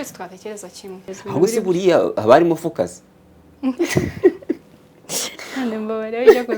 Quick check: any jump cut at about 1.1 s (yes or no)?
yes